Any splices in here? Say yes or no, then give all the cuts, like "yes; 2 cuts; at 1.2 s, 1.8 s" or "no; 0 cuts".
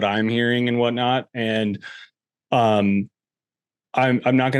no; 0 cuts